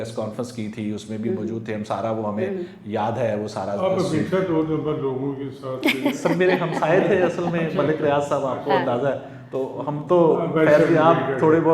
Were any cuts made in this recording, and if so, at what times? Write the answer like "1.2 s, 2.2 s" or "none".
none